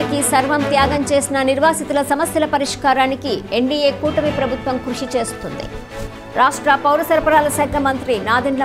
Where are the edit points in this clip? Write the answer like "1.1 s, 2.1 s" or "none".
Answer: none

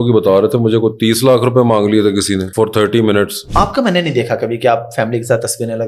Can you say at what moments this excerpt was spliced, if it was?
2.5 s, 3.4 s

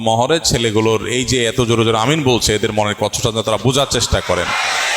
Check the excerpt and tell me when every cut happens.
none

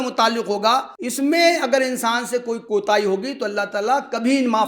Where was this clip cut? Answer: 1.0 s, 2.6 s

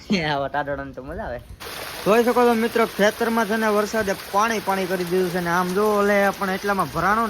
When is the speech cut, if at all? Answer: 1.6 s

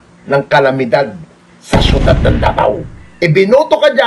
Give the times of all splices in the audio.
3.0 s

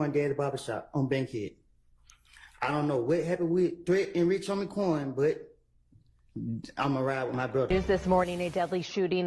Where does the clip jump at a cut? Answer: 7.7 s

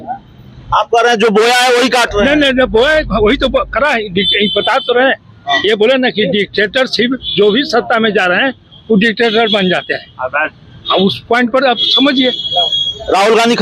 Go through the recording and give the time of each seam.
none

